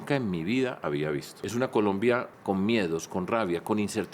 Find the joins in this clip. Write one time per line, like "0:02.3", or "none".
0:01.3
0:02.3

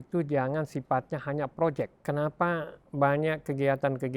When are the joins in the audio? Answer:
0:02.0

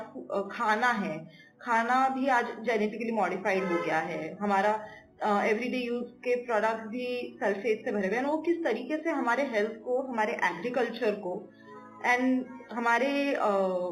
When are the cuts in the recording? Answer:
none

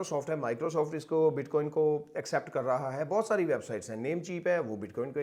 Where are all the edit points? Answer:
none

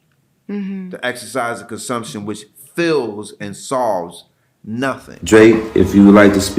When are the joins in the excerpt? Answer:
0:05.1

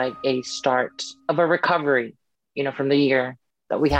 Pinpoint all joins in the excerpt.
0:01.1

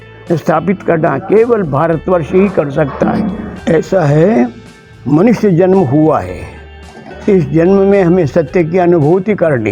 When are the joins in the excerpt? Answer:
0:03.5

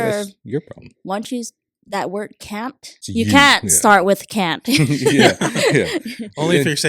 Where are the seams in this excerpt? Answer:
0:02.9

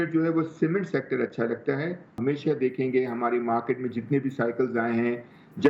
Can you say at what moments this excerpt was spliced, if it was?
0:02.1

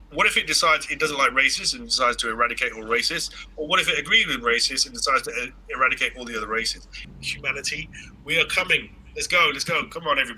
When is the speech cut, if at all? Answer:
0:07.0

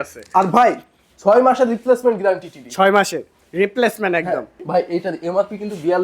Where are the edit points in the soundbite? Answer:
0:04.5

